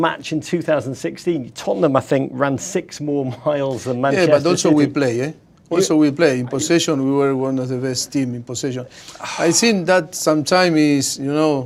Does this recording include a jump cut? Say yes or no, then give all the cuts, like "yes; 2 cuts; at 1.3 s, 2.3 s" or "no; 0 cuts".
no; 0 cuts